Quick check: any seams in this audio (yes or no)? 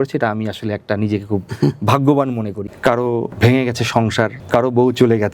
yes